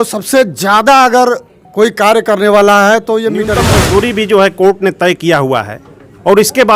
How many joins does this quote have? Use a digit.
1